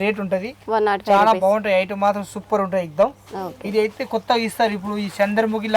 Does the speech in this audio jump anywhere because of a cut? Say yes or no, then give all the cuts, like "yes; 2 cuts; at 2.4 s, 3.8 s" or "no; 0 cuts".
no; 0 cuts